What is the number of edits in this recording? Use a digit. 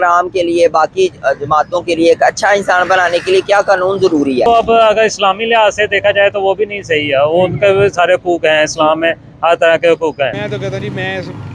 2